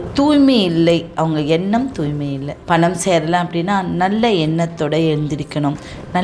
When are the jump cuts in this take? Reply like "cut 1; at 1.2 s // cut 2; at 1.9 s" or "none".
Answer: cut 1; at 2.5 s